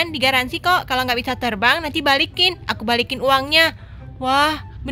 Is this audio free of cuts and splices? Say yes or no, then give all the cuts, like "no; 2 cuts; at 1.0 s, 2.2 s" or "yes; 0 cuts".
yes; 0 cuts